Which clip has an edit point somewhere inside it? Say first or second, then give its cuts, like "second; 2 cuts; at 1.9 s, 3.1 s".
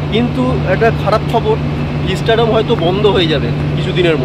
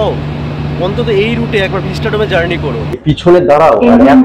second; 1 cut; at 3.0 s